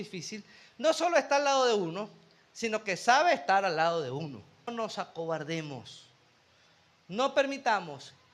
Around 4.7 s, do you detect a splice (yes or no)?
yes